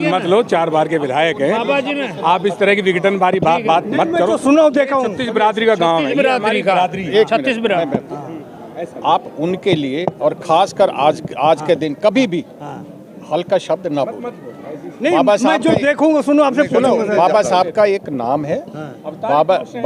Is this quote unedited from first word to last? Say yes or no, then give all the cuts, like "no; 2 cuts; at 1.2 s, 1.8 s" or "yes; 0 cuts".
yes; 0 cuts